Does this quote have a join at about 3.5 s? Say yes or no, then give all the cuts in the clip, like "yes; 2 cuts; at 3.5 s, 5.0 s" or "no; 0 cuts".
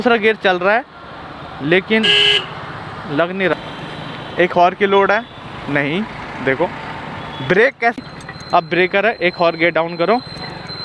yes; 2 cuts; at 3.5 s, 8.0 s